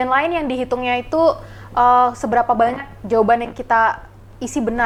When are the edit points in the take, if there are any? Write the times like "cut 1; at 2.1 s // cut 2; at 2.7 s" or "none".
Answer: none